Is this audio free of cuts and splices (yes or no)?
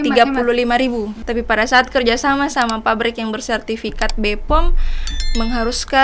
no